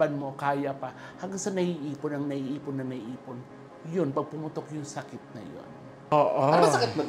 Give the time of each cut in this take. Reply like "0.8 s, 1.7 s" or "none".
6.1 s